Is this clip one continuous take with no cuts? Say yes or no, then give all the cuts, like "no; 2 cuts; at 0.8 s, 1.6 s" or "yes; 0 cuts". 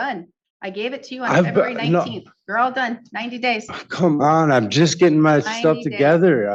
yes; 0 cuts